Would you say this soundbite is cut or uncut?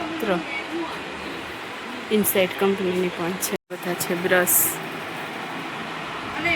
cut